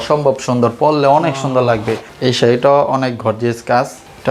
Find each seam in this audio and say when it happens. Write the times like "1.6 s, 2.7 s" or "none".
2.1 s